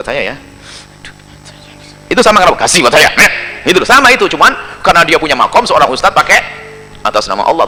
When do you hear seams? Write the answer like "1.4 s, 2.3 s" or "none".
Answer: none